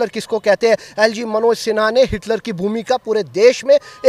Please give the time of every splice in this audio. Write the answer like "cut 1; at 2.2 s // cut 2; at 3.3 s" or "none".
none